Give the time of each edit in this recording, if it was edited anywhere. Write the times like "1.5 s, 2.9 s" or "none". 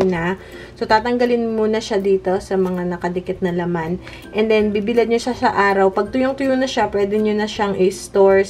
none